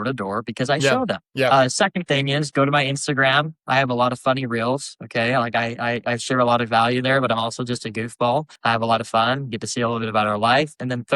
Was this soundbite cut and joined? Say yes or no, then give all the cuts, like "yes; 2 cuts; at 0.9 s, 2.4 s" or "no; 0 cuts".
yes; 2 cuts; at 1.2 s, 8.5 s